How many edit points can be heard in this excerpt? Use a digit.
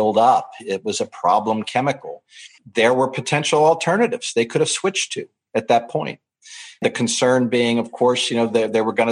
2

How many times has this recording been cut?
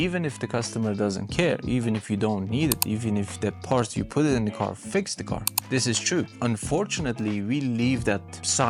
0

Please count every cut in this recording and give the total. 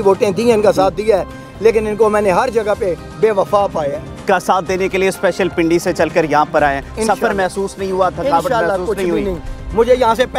1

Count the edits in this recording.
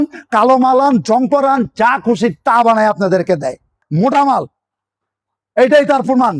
1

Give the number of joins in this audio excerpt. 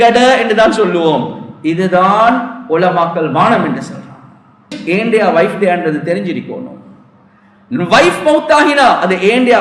1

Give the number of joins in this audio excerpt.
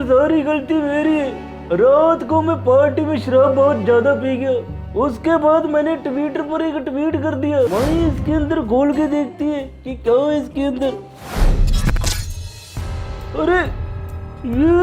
2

